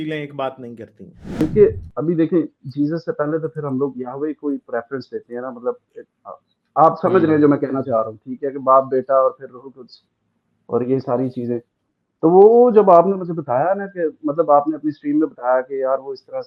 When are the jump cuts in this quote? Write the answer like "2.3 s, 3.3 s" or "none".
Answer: 1.4 s